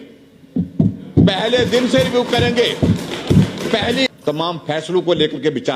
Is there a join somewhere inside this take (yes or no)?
yes